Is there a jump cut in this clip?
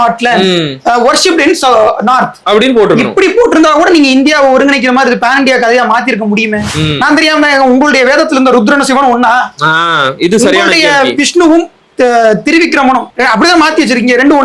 yes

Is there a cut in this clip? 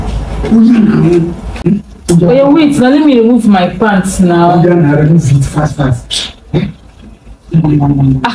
yes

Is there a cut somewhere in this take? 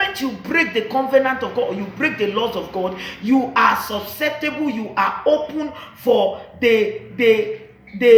no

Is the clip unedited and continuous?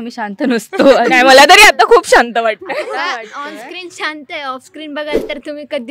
yes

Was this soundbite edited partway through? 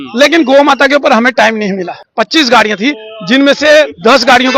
yes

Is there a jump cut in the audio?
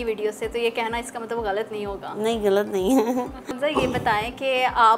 yes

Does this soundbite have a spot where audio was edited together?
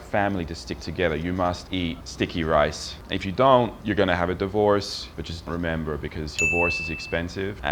yes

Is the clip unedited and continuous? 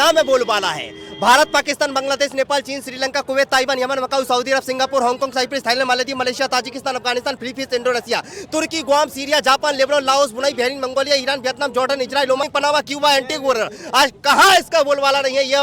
no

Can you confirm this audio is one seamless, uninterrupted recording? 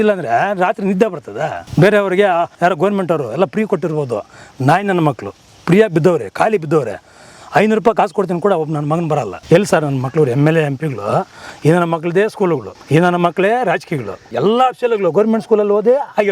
no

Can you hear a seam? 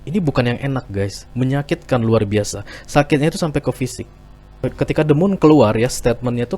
yes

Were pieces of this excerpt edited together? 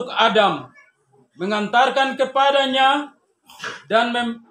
no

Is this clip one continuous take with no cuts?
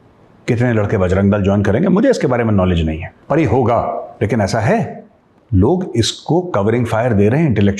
no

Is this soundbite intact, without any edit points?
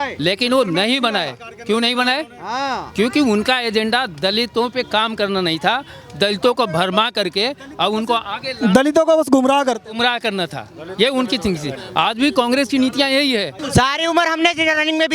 yes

